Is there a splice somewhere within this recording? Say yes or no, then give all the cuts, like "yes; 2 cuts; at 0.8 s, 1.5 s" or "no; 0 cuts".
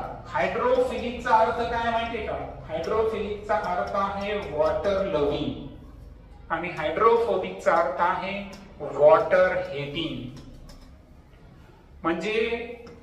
no; 0 cuts